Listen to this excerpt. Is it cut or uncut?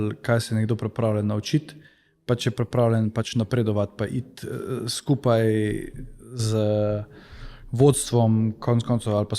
uncut